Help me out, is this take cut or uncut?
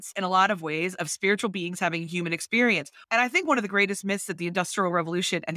cut